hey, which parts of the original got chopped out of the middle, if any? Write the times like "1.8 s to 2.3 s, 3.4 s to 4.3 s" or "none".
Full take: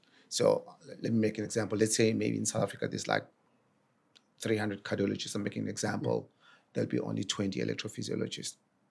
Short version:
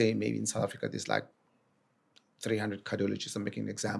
none